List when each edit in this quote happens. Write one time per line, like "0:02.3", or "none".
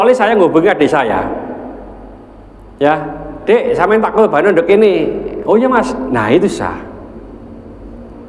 none